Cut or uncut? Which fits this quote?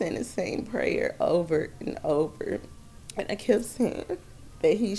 uncut